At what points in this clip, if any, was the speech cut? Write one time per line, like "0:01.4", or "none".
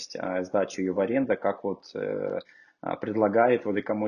none